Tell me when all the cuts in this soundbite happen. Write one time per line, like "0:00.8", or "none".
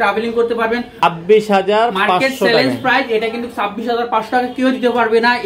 0:01.0